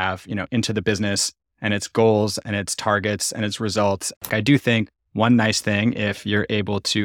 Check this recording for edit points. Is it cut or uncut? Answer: cut